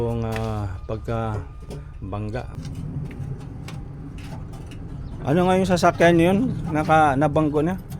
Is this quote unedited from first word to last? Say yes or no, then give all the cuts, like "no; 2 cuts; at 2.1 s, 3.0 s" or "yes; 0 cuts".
no; 1 cut; at 2.6 s